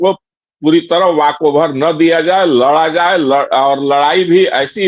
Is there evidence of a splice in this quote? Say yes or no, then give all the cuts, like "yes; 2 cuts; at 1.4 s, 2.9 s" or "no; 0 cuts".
no; 0 cuts